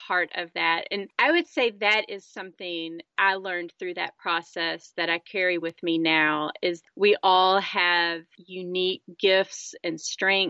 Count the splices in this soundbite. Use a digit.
2